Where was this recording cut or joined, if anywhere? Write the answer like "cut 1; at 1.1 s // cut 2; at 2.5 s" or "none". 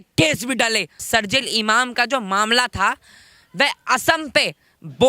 cut 1; at 0.9 s